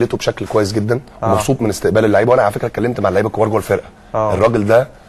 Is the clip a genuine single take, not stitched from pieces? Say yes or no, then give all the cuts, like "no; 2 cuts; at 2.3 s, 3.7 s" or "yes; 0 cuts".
no; 1 cut; at 3.5 s